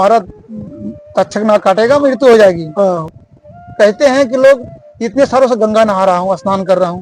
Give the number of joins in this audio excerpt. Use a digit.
1